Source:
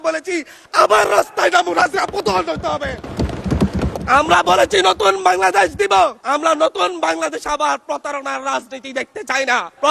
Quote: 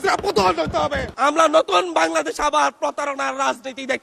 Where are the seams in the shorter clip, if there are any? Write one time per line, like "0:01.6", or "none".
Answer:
0:01.1